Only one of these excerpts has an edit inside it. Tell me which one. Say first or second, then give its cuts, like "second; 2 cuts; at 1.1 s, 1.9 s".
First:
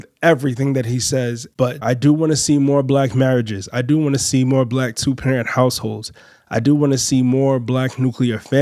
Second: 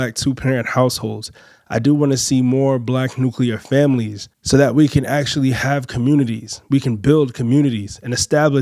first; 1 cut; at 1.6 s